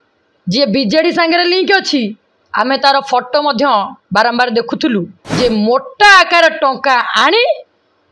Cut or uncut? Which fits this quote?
cut